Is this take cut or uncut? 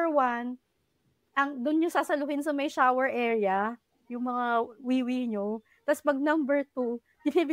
uncut